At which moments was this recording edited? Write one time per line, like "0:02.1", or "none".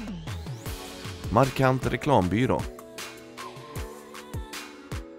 0:02.6